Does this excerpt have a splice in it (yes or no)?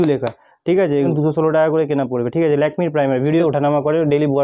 yes